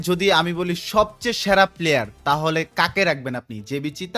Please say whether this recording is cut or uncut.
uncut